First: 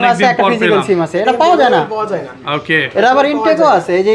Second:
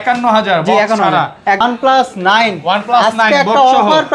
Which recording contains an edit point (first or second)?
second